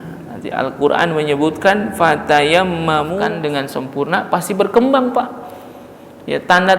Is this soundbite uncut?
no; 1 cut; at 3.2 s

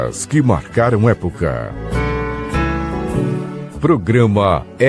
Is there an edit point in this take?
yes; 2 cuts; at 1.7 s, 3.8 s

